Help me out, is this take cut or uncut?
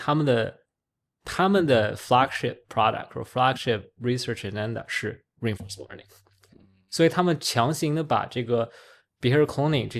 uncut